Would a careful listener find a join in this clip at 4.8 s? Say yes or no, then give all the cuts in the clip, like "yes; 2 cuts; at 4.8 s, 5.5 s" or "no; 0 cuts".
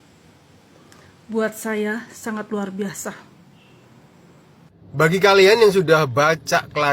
yes; 1 cut; at 4.8 s